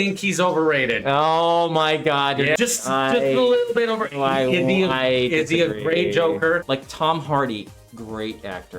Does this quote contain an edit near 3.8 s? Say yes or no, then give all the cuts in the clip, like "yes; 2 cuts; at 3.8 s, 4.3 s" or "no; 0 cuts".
no; 2 cuts; at 2.6 s, 6.6 s